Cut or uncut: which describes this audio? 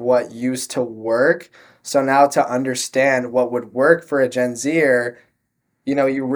uncut